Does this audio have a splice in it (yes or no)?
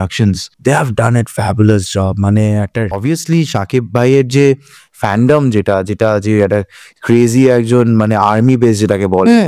yes